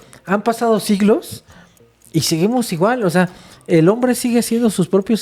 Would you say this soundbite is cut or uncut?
uncut